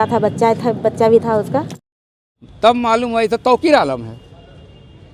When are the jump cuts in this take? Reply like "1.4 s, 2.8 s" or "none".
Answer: 2.0 s